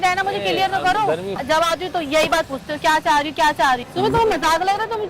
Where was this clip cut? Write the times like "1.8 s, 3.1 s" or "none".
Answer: 1.4 s, 3.9 s

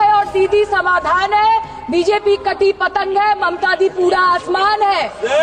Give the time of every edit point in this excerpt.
none

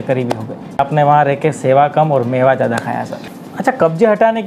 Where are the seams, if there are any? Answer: 0.8 s, 3.5 s

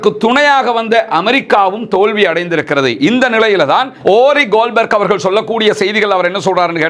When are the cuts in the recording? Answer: 3.9 s

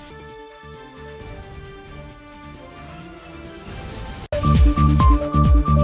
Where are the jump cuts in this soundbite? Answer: 4.3 s

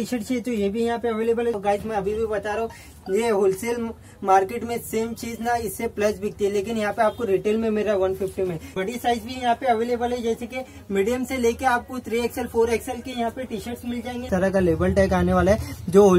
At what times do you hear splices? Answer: 1.6 s, 8.7 s, 14.3 s

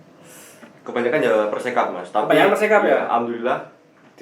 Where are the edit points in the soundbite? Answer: none

